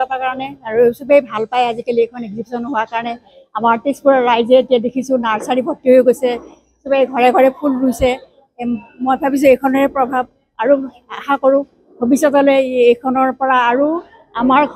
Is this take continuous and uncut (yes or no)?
yes